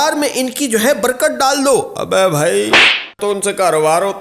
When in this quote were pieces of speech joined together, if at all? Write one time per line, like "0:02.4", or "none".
0:03.0